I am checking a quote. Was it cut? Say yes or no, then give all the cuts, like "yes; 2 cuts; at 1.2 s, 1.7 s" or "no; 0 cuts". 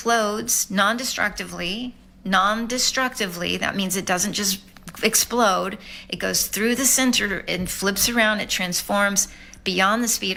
no; 0 cuts